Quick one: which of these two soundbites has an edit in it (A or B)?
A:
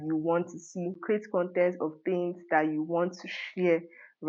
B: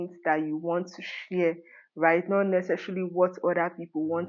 A